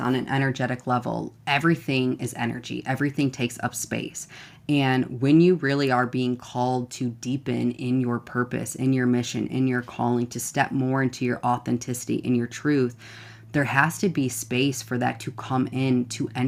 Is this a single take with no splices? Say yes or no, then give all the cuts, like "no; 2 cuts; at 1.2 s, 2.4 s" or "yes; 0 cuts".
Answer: yes; 0 cuts